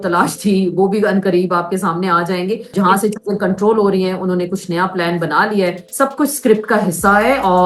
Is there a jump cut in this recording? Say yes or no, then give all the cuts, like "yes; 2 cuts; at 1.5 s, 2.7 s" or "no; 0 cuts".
yes; 2 cuts; at 2.7 s, 5.8 s